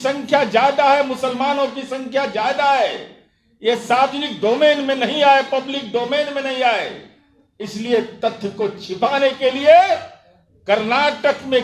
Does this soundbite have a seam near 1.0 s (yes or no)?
no